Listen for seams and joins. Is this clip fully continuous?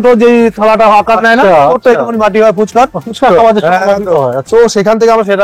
yes; 0 cuts

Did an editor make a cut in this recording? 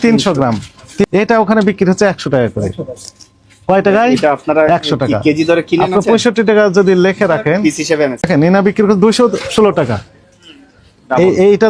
yes; 2 cuts; at 1.1 s, 8.3 s

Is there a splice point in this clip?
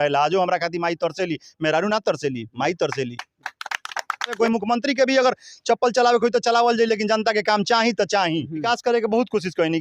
yes; 2 cuts; at 4.4 s, 8.6 s

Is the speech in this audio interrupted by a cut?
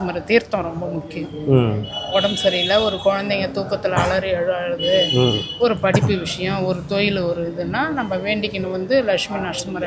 no; 0 cuts

